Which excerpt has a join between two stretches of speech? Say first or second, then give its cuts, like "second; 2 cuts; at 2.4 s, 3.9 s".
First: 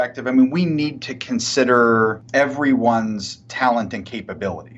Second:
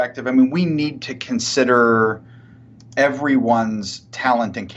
first; 1 cut; at 2.2 s